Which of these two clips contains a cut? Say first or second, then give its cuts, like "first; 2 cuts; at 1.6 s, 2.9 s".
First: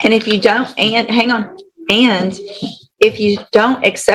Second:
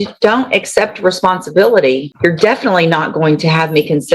second; 1 cut; at 2.1 s